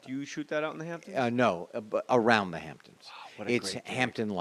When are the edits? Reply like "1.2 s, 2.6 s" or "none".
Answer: none